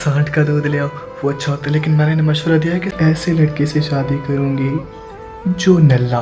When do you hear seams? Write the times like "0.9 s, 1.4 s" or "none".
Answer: 2.9 s